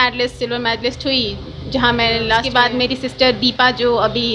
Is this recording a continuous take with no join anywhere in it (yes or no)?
no